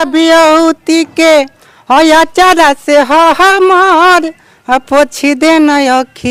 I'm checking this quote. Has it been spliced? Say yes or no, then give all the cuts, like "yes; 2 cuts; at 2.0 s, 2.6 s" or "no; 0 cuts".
no; 0 cuts